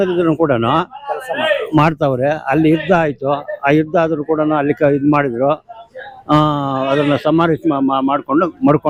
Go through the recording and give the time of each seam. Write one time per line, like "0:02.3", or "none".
none